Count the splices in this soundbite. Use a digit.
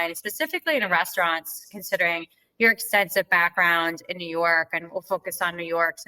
0